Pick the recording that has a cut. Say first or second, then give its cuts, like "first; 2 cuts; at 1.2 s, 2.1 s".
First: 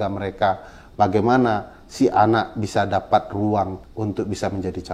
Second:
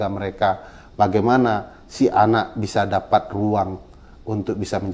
first; 1 cut; at 3.8 s